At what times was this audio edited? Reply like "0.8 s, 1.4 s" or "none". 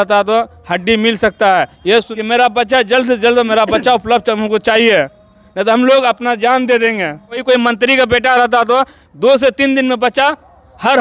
2.1 s, 7.4 s